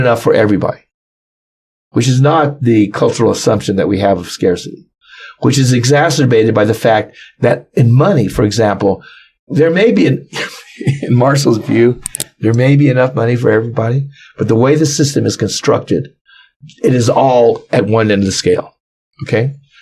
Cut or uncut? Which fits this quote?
uncut